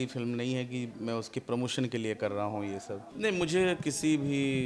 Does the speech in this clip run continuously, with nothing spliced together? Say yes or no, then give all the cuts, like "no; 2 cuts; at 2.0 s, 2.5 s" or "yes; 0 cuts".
no; 1 cut; at 3.0 s